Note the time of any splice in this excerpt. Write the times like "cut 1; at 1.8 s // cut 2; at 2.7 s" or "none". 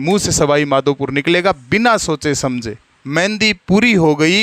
cut 1; at 2.9 s